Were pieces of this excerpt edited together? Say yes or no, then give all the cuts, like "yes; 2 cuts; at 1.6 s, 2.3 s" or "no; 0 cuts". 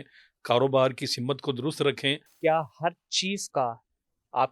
yes; 1 cut; at 2.3 s